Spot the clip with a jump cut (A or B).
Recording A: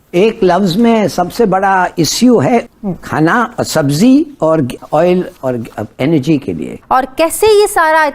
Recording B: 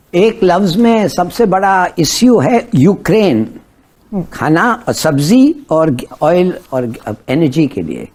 A